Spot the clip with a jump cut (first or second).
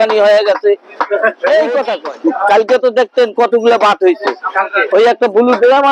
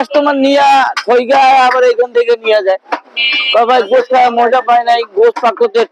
first